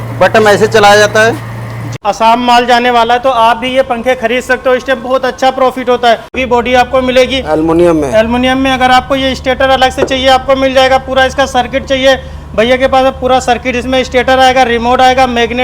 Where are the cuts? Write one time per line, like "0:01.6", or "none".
0:01.9
0:06.4